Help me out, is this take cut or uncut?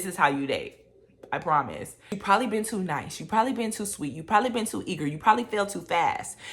cut